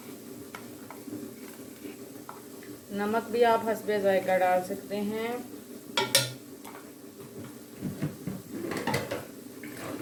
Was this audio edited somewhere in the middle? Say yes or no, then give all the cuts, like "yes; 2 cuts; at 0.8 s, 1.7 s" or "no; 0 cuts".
no; 0 cuts